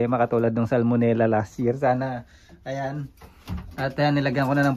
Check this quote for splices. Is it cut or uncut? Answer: uncut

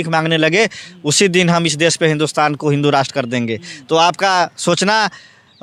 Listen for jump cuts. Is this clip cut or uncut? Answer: uncut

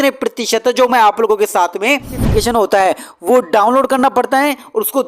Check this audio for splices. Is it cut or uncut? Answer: cut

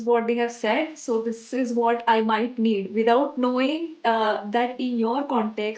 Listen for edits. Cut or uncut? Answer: uncut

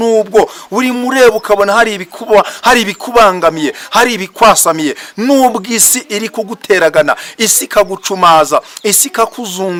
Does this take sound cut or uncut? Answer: uncut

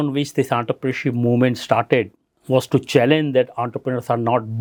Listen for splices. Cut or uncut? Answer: uncut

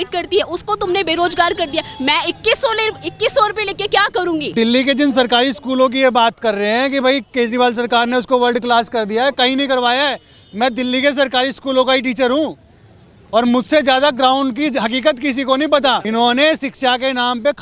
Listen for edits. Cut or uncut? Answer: cut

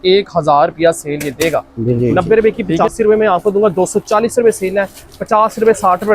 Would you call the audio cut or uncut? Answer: cut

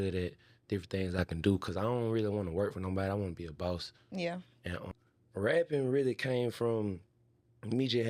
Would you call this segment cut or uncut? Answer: cut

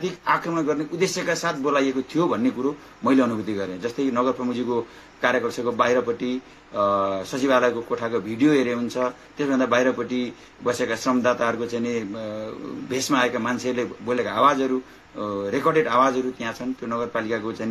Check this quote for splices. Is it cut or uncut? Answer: uncut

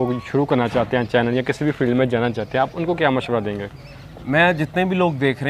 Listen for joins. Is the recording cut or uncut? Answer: uncut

